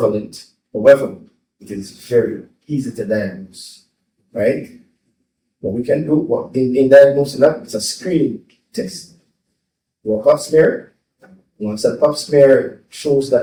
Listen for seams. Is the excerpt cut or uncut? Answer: uncut